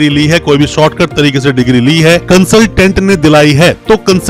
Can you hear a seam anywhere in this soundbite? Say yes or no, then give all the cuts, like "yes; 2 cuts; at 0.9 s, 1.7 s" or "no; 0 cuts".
no; 0 cuts